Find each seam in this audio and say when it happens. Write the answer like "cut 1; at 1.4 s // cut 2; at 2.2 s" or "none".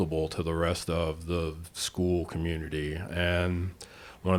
none